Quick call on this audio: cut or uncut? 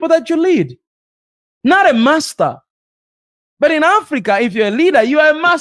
uncut